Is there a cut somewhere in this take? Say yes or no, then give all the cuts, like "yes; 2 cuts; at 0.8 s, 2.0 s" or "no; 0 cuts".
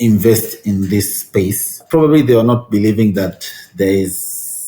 yes; 1 cut; at 1.8 s